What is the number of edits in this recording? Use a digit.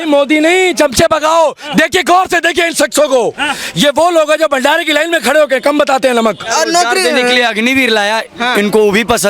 1